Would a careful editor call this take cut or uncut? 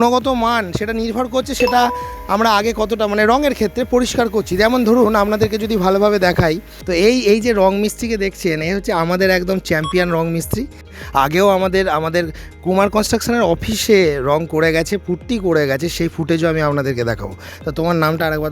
cut